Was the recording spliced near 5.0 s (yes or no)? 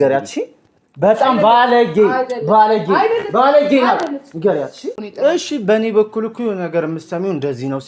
yes